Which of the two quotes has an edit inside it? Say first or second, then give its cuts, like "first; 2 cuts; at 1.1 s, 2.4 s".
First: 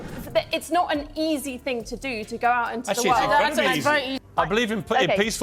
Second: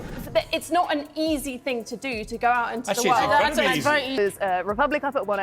second; 1 cut; at 4.1 s